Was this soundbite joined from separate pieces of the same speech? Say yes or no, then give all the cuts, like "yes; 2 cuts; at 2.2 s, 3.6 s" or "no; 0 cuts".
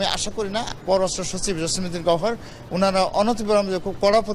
no; 0 cuts